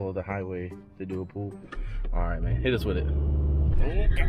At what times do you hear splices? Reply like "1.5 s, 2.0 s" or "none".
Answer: none